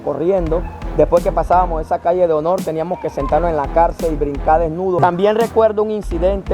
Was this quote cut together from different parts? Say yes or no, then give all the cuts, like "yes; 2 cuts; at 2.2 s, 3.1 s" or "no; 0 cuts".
yes; 1 cut; at 5.0 s